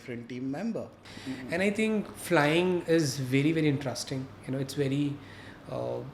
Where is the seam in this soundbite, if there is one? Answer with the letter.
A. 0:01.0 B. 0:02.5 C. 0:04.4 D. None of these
A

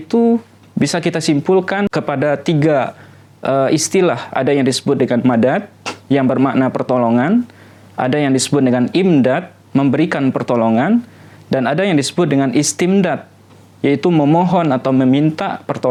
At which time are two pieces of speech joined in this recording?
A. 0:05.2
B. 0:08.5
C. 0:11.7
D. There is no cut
D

